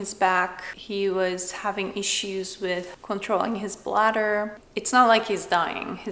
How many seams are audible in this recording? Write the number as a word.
one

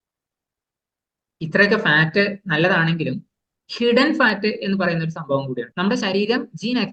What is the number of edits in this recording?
one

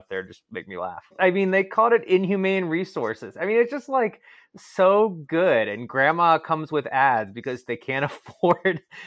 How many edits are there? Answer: one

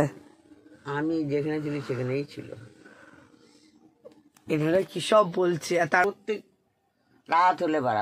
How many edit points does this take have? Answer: one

